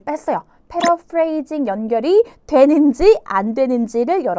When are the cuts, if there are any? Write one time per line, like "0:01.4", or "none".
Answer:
none